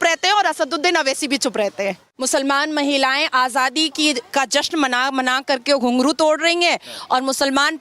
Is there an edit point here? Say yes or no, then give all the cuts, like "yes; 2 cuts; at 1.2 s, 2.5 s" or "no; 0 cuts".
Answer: yes; 1 cut; at 2.1 s